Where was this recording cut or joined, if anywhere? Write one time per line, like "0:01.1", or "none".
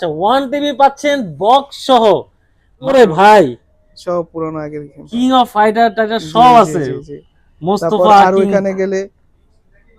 0:02.9

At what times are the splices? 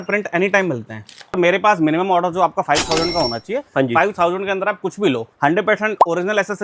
0:01.4
0:05.3

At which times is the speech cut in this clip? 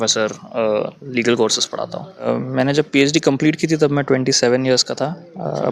0:02.3

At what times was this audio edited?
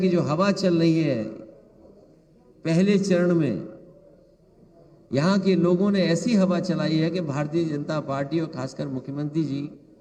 none

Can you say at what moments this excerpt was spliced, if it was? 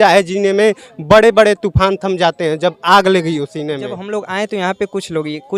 0:04.0

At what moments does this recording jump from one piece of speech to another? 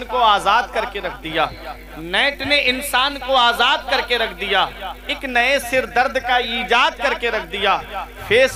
none

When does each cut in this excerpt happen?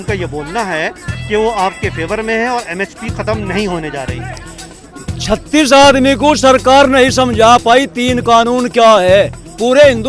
none

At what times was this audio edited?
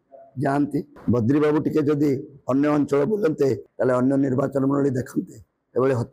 0:00.9
0:03.7

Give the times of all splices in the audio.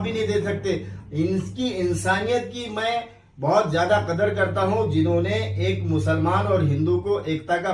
none

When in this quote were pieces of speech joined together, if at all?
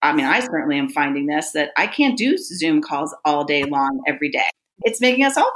0:04.4

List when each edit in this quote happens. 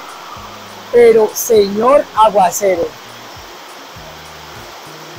none

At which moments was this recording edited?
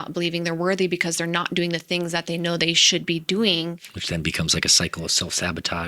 0:03.9

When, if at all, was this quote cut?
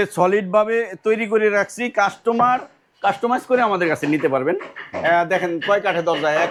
none

